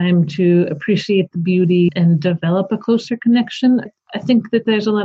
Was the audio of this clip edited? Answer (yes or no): no